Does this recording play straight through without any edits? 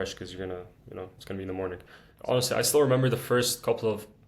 no; 1 cut; at 2.1 s

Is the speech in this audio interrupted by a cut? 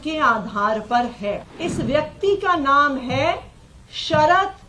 yes; 1 cut; at 1.5 s

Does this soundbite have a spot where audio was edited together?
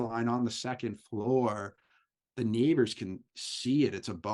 no; 0 cuts

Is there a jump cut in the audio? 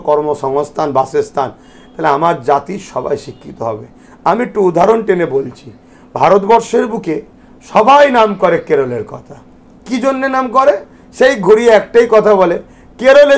no; 0 cuts

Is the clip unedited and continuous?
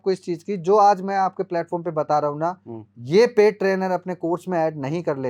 yes; 0 cuts

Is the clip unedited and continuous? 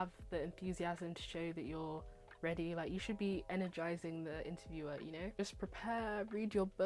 no; 1 cut; at 5.4 s

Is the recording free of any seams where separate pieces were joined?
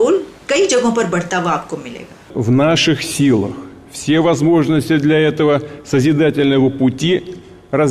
no; 1 cut; at 2.2 s

